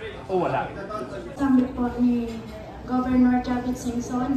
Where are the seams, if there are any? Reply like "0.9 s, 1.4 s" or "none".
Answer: 1.4 s